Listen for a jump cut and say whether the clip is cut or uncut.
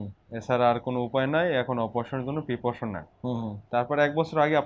uncut